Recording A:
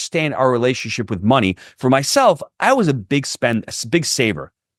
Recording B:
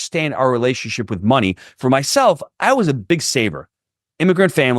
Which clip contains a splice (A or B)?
B